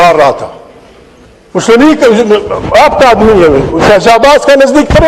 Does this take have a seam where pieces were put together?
no; 0 cuts

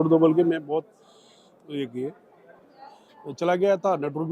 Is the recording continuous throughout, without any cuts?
no; 1 cut; at 2.7 s

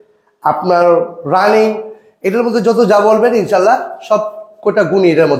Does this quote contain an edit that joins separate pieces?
no; 0 cuts

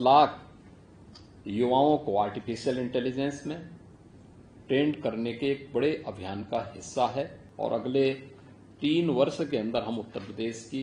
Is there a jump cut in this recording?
yes; 1 cut; at 7.4 s

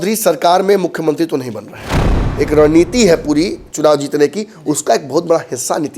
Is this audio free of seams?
no; 1 cut; at 2.2 s

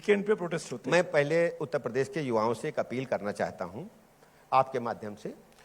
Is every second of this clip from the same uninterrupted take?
no; 1 cut; at 1.0 s

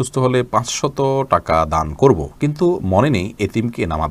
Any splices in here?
no; 0 cuts

